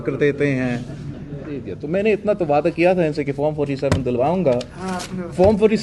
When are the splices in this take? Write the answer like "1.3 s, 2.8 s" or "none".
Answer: 1.7 s